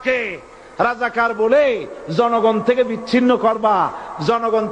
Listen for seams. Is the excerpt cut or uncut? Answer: uncut